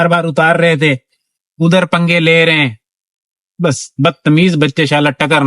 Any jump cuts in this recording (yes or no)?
no